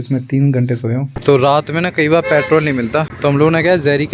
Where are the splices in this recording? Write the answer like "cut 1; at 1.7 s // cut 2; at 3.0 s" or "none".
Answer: cut 1; at 1.2 s // cut 2; at 3.1 s